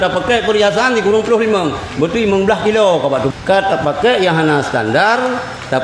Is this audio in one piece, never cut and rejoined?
no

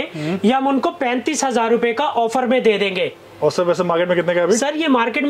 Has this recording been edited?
no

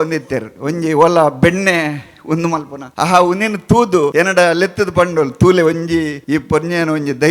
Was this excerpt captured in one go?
no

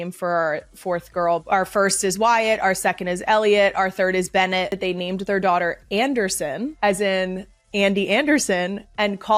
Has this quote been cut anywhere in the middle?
no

